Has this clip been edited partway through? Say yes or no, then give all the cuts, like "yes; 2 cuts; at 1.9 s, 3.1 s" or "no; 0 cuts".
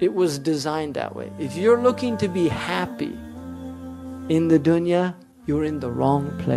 yes; 1 cut; at 5.3 s